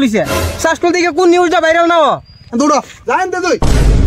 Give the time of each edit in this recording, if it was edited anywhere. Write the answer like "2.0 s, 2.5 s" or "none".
2.4 s